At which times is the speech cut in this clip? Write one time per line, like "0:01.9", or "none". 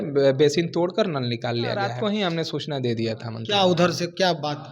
0:01.9